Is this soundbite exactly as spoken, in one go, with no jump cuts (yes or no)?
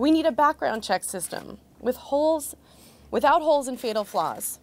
no